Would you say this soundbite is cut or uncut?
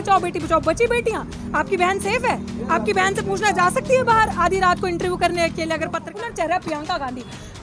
cut